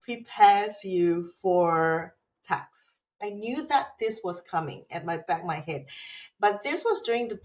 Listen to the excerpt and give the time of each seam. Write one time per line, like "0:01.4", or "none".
none